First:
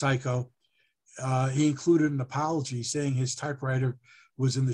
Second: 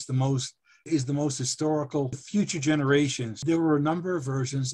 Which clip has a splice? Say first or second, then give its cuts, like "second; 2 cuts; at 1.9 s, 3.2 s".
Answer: second; 3 cuts; at 0.8 s, 2.2 s, 3.3 s